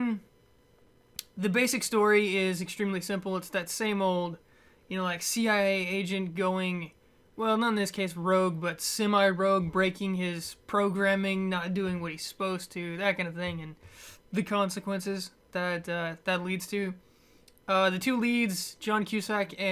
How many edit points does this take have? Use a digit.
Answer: 1